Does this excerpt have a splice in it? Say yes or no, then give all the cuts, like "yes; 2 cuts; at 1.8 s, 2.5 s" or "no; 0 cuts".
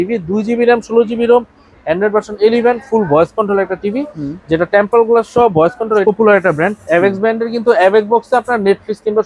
yes; 1 cut; at 6.0 s